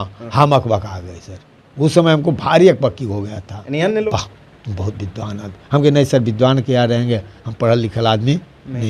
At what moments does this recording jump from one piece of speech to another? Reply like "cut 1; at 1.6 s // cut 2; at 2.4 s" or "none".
cut 1; at 4.0 s

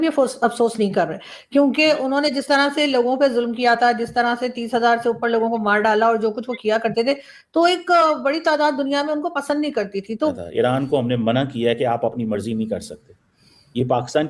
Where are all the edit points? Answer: cut 1; at 10.3 s

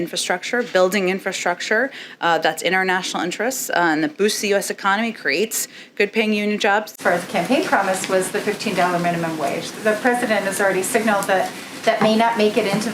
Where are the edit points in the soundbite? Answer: cut 1; at 6.9 s

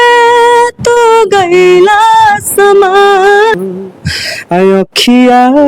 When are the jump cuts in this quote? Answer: cut 1; at 3.6 s

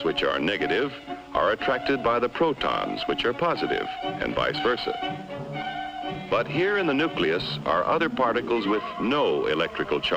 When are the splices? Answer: cut 1; at 3.9 s

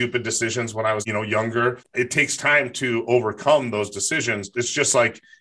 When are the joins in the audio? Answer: cut 1; at 1.0 s // cut 2; at 1.8 s // cut 3; at 4.5 s

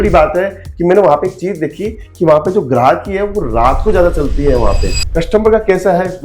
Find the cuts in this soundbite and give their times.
cut 1; at 4.9 s

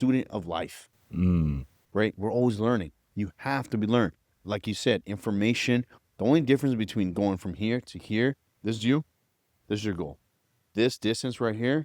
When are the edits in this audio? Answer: cut 1; at 8.5 s

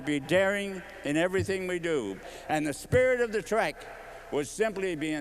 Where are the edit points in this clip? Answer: cut 1; at 2.3 s

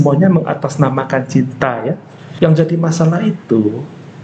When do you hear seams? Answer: cut 1; at 2.3 s

